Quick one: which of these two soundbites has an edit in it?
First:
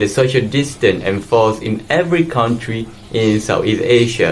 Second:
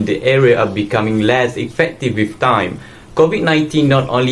second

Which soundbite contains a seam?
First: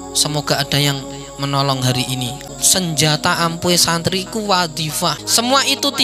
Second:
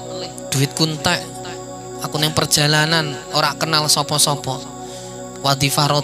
first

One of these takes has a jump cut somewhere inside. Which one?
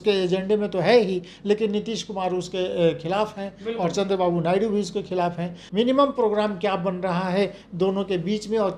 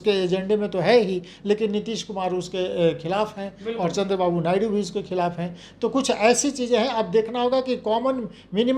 first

